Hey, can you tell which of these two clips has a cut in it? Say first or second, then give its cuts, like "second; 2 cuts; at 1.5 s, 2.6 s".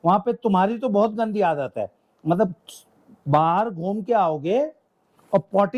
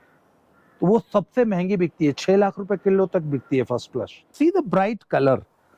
second; 1 cut; at 4.3 s